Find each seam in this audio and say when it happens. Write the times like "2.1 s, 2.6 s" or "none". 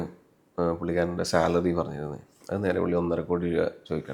none